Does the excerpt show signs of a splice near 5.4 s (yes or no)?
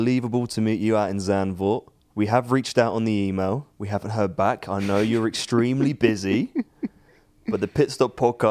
no